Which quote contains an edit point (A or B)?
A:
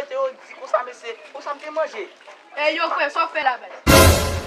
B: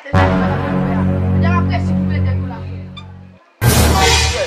A